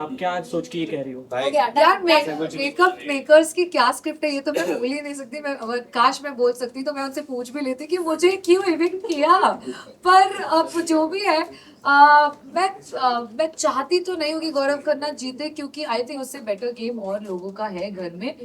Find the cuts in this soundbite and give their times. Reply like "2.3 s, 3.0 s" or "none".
none